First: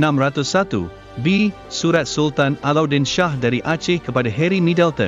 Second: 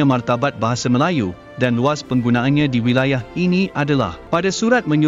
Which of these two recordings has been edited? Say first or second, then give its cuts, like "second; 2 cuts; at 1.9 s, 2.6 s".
second; 1 cut; at 4.2 s